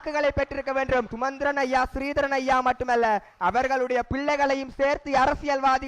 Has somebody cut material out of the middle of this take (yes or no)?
yes